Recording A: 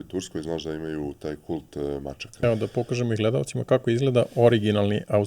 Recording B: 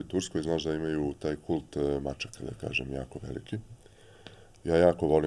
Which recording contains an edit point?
A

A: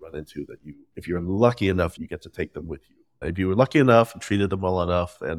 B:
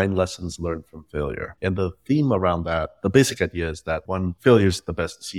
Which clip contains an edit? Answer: B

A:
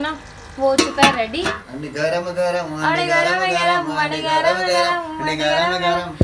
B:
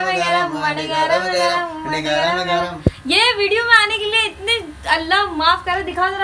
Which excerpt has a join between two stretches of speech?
A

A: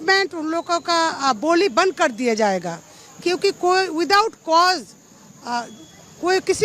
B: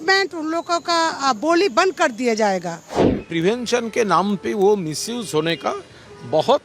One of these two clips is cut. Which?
B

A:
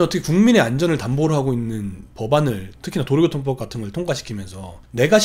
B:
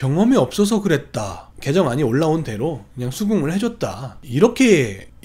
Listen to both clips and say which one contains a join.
B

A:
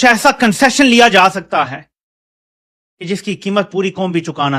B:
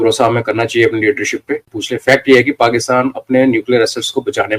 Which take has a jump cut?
B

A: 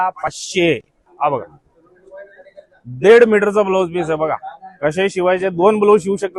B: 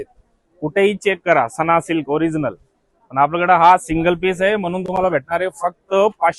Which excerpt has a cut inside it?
A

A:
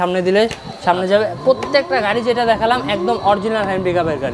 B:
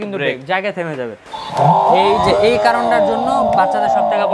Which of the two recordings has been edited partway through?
B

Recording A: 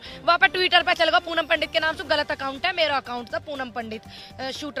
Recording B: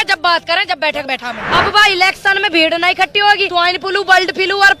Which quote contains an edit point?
B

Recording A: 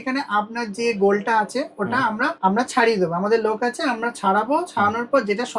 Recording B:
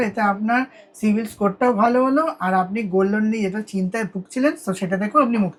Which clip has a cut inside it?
A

